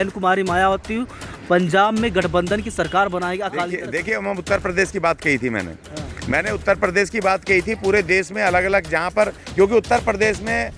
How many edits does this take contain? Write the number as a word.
one